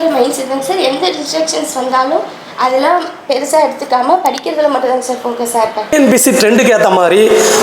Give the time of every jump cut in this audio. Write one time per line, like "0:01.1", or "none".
0:05.8